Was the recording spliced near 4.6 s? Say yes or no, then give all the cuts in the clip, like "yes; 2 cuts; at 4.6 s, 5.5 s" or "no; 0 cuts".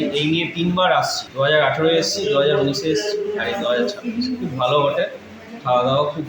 no; 1 cut; at 1.2 s